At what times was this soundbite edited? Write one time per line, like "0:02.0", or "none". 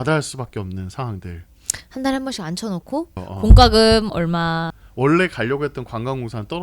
0:03.2
0:04.8